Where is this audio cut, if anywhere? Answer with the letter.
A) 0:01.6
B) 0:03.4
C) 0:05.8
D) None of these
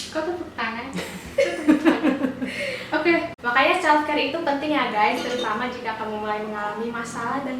B